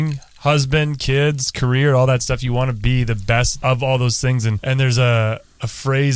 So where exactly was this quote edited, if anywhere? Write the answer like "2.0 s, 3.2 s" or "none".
3.5 s, 4.5 s